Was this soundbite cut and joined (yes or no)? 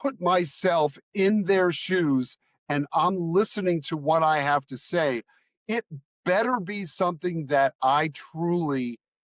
no